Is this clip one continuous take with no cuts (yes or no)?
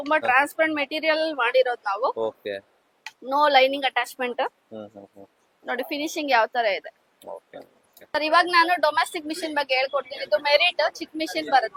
yes